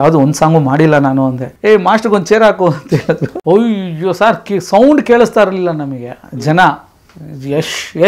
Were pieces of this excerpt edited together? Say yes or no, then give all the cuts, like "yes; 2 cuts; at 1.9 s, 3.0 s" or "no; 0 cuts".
yes; 2 cuts; at 1.5 s, 3.3 s